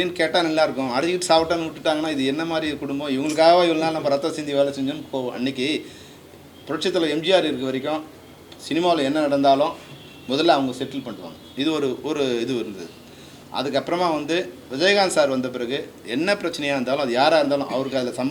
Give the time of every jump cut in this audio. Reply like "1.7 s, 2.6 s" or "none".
none